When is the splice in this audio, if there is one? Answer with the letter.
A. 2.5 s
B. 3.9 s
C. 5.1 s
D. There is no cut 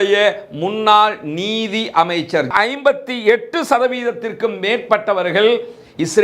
A